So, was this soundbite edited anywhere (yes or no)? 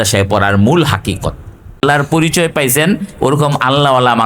yes